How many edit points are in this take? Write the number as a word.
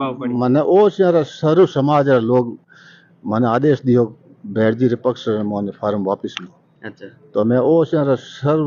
zero